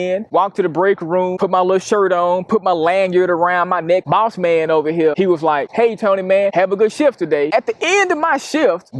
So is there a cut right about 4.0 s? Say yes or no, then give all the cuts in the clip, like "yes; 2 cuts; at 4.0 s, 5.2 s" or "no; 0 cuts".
yes; 2 cuts; at 4.0 s, 7.5 s